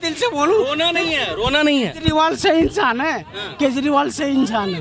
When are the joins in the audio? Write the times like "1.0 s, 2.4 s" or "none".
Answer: none